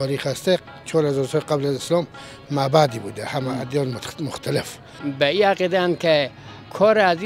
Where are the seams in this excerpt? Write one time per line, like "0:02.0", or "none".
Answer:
0:05.0